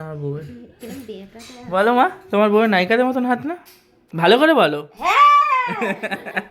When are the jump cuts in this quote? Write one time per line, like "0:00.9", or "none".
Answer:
none

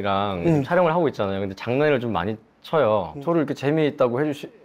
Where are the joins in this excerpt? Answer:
0:03.1

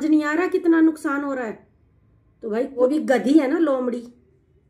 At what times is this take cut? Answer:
0:02.8

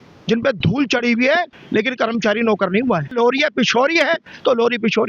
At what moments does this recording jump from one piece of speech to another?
0:03.1

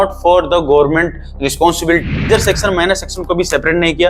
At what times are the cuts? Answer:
0:02.1

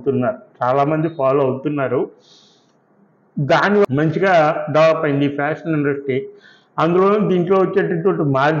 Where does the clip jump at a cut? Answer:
0:03.9

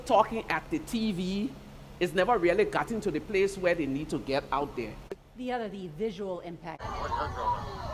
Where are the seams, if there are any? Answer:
none

